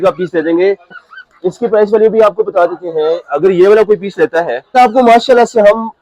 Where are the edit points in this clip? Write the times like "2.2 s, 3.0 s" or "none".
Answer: 1.0 s, 4.7 s

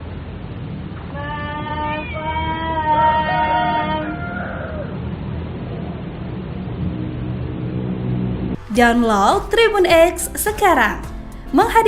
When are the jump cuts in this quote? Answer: 5.0 s

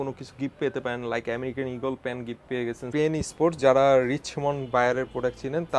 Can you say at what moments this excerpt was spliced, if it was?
2.9 s

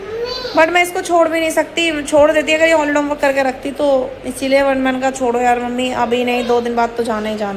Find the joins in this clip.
none

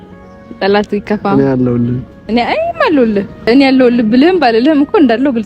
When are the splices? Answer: 3.5 s

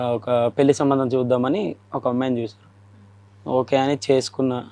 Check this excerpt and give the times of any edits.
none

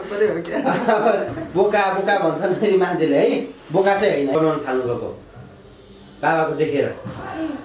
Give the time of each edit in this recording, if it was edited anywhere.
4.3 s

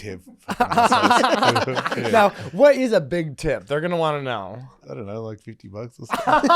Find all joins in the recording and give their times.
1.9 s, 4.8 s

